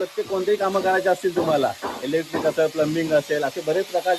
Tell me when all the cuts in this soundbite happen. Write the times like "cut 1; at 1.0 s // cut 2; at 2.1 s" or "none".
none